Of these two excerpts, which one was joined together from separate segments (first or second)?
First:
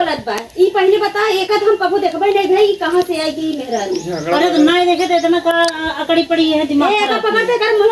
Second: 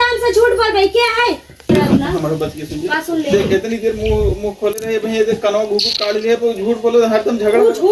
second